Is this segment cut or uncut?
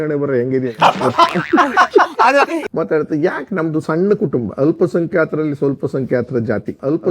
cut